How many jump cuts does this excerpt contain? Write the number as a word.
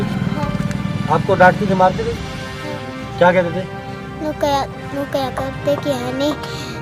zero